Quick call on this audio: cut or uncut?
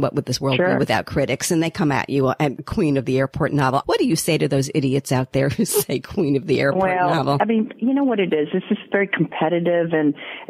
cut